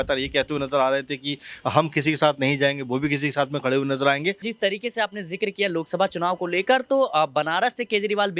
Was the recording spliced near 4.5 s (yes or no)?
yes